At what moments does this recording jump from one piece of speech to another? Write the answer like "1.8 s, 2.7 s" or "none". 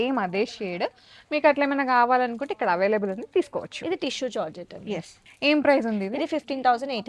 none